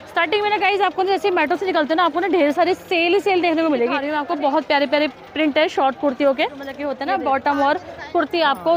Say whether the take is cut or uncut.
cut